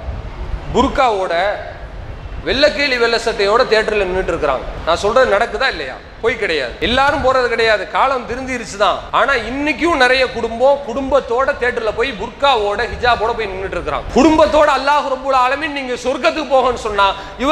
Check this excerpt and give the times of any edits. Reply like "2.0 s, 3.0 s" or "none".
4.7 s, 6.7 s, 9.0 s, 14.0 s